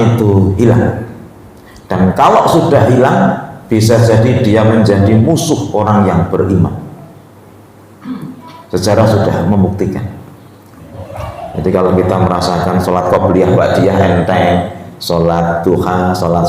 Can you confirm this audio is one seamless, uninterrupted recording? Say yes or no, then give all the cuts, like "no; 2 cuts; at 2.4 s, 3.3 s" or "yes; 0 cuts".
no; 1 cut; at 11.0 s